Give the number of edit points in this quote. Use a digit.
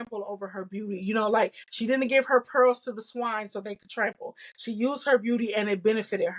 0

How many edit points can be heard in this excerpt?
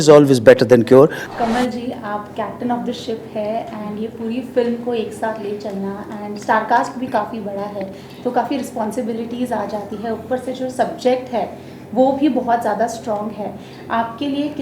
1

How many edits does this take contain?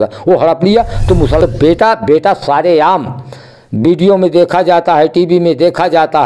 1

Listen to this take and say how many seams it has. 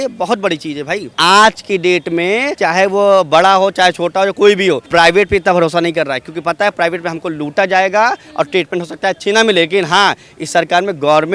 3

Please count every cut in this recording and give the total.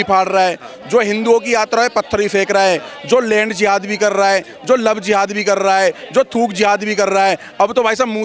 0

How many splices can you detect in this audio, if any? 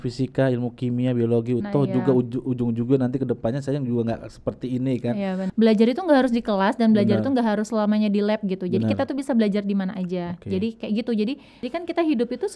2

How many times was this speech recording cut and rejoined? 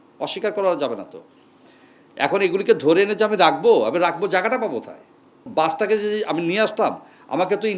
1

